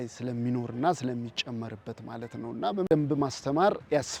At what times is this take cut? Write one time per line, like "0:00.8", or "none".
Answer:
0:02.9

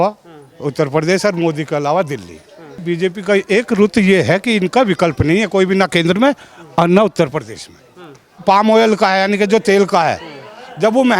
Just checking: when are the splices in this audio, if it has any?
0:02.8
0:08.4

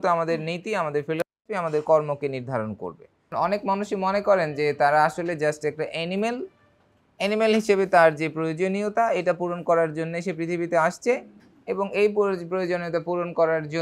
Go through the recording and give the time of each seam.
0:03.3

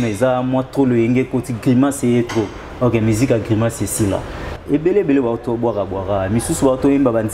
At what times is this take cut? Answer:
0:04.5

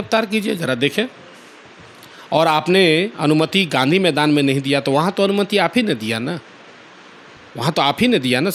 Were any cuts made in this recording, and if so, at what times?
none

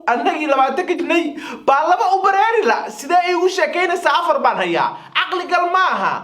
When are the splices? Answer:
0:01.0

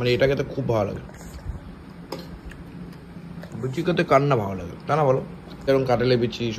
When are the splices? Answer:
0:05.7

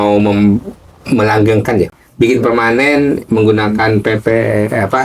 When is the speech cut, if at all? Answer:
0:01.9

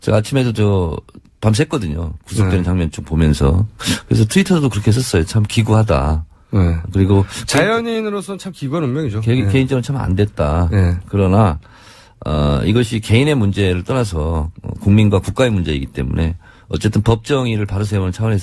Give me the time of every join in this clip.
0:12.6

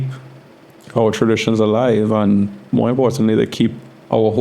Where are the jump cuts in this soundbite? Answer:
none

